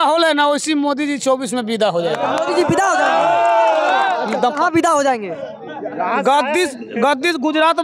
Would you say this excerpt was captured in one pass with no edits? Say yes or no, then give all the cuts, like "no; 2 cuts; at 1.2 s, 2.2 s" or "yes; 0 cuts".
yes; 0 cuts